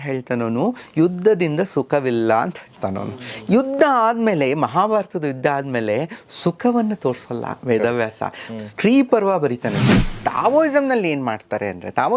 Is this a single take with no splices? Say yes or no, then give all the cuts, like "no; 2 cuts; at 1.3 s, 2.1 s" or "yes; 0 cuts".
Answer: no; 1 cut; at 9.9 s